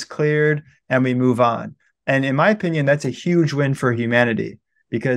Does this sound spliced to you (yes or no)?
no